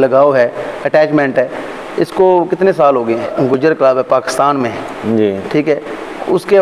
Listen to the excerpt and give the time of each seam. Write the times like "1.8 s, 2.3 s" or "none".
3.3 s

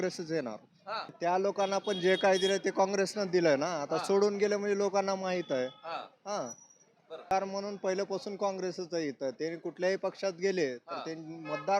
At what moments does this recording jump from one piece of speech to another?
1.1 s, 7.3 s

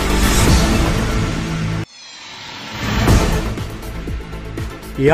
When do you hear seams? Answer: none

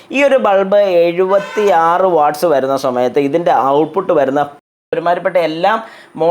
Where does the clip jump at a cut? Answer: 4.8 s

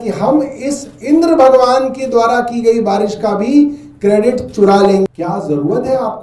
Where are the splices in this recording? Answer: 5.1 s

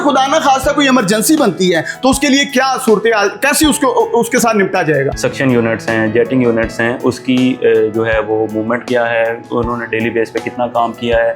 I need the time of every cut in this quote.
5.1 s

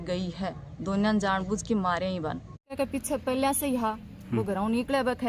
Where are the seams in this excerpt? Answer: 2.7 s

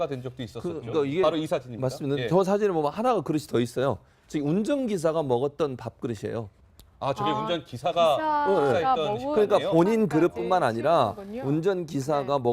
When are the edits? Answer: 7.5 s

